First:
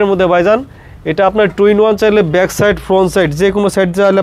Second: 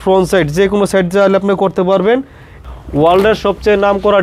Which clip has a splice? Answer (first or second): second